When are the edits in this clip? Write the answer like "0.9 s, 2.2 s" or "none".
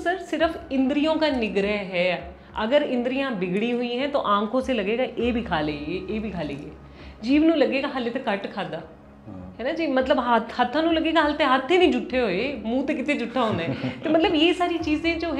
none